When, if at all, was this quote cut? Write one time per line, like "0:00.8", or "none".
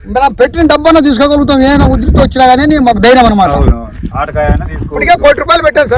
none